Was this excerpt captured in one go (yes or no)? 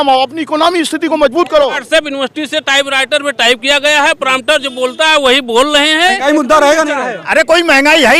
no